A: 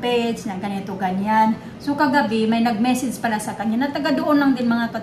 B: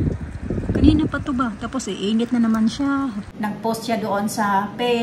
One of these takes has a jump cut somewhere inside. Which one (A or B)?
B